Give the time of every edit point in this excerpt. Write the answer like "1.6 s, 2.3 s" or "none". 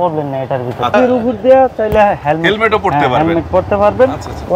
0.9 s